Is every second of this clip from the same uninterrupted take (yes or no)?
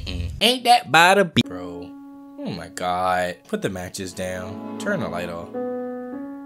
no